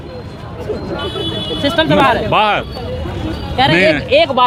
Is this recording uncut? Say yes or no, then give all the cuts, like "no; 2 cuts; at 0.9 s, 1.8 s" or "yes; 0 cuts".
yes; 0 cuts